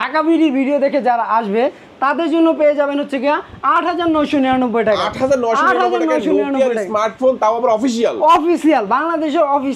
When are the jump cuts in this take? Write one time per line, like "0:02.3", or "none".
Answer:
none